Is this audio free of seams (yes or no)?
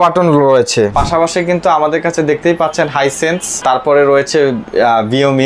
no